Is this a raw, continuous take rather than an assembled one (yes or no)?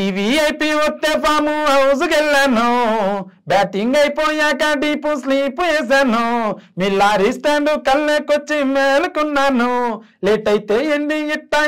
yes